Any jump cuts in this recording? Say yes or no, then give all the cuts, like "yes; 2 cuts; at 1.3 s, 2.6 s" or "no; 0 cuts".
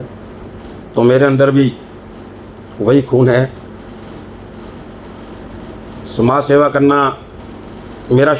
no; 0 cuts